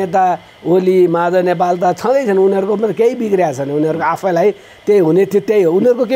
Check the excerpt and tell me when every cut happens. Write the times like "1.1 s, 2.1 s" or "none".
none